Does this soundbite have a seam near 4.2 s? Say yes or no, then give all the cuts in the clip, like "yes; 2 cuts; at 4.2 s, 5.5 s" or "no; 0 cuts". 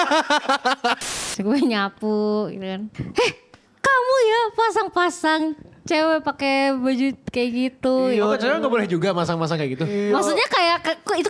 no; 2 cuts; at 1.1 s, 3.0 s